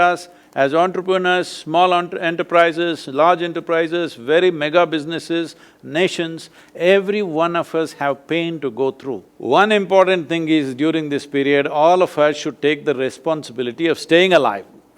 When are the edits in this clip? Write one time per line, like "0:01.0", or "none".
0:09.3